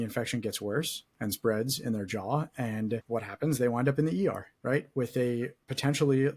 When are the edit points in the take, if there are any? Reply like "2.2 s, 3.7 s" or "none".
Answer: 3.0 s, 4.5 s